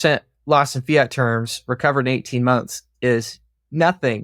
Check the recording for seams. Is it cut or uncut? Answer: uncut